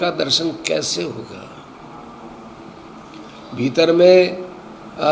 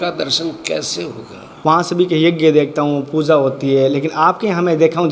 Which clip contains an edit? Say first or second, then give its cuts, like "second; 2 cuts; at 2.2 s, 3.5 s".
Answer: second; 1 cut; at 1.4 s